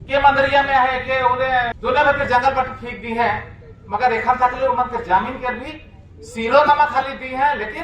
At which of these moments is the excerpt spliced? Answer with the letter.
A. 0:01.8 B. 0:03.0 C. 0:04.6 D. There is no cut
A